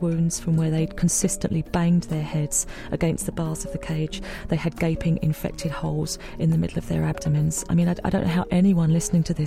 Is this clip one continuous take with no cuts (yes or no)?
no